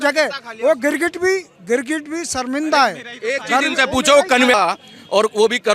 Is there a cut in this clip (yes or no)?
yes